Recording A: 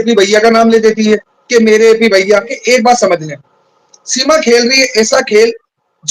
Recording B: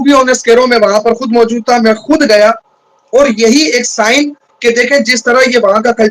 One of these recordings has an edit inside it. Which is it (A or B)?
A